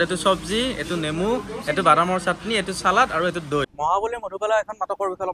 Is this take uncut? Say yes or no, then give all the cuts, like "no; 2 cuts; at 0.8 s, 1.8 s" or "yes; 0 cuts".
no; 1 cut; at 3.7 s